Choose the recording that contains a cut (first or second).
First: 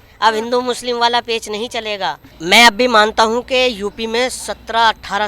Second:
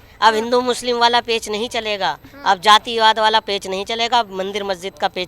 first